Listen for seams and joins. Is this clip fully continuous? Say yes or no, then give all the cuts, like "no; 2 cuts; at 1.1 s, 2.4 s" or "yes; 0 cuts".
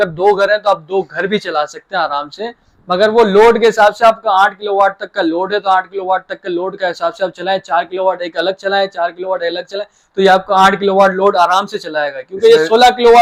yes; 0 cuts